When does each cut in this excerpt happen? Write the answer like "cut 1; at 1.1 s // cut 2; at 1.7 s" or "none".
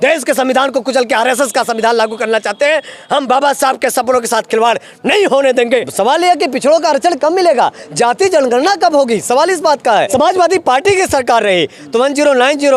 cut 1; at 5.9 s // cut 2; at 10.1 s